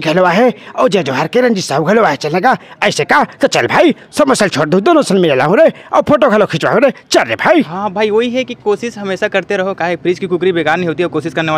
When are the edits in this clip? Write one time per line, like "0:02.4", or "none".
0:07.7